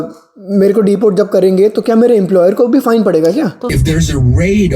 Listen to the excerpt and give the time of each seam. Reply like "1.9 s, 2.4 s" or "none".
3.6 s